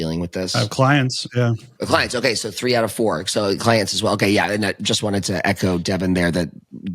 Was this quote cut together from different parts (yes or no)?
yes